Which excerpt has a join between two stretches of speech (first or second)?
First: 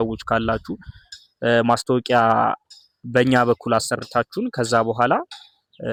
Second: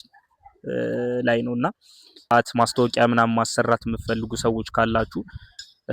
second